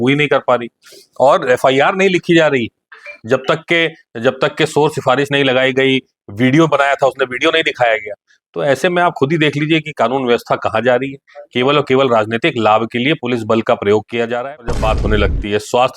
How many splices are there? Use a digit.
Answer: 1